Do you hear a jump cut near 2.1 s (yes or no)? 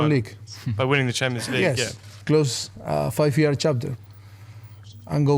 yes